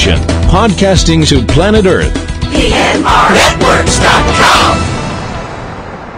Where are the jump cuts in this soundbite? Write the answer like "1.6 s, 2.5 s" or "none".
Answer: none